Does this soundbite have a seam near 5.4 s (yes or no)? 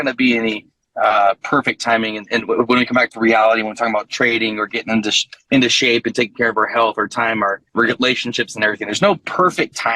no